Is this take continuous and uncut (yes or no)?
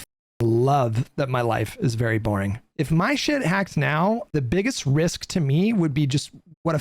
no